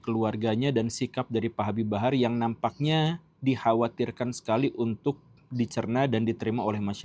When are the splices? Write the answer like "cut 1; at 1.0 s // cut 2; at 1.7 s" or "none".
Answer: none